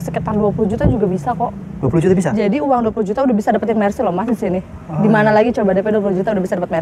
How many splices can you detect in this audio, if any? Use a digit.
0